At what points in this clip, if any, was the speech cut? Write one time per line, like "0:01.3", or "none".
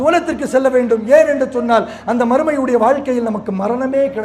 none